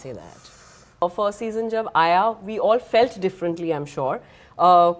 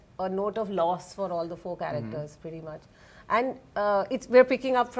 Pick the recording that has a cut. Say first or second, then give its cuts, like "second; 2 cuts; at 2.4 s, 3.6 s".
first; 1 cut; at 1.0 s